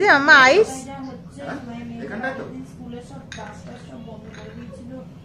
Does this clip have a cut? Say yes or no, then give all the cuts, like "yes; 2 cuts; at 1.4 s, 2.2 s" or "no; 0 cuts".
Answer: no; 0 cuts